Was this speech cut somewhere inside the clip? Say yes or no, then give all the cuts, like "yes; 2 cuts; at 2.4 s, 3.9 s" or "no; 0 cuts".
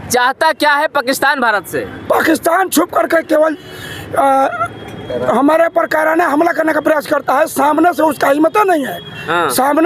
no; 0 cuts